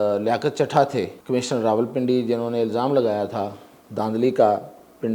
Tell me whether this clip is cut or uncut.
cut